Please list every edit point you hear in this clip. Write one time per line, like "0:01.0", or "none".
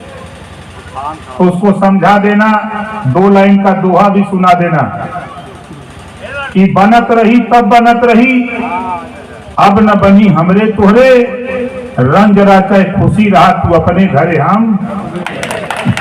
none